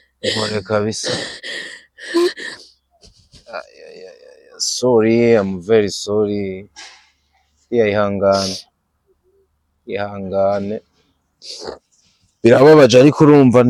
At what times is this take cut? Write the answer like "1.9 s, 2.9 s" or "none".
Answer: none